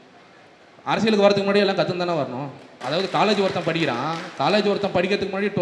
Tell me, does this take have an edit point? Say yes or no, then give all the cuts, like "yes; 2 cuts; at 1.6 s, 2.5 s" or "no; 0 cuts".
yes; 1 cut; at 2.8 s